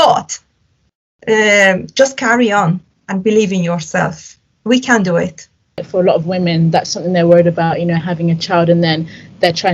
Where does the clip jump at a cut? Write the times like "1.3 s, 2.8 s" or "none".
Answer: 5.9 s